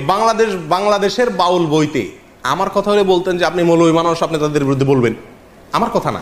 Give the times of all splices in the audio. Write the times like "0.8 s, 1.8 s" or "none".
none